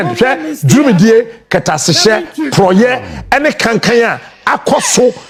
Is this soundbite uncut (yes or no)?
yes